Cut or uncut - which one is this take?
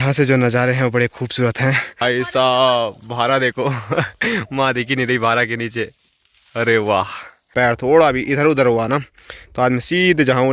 cut